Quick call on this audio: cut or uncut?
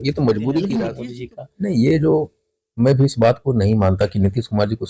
cut